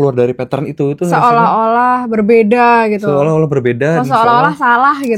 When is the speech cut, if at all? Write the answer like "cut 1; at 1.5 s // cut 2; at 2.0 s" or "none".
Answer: none

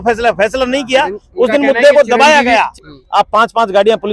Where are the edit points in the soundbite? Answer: cut 1; at 2.8 s

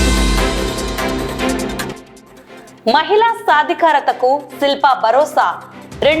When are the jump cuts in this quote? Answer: cut 1; at 1.6 s

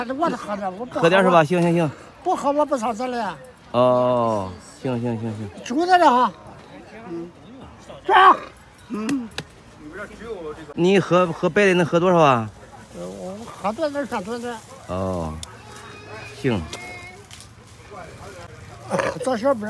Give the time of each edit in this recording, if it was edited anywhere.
cut 1; at 10.7 s

